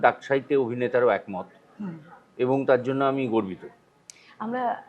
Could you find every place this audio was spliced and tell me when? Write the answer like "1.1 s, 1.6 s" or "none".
none